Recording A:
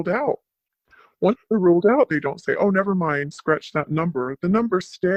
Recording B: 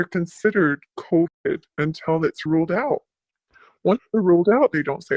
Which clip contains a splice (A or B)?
B